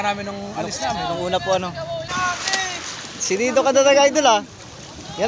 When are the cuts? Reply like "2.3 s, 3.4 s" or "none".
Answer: 2.1 s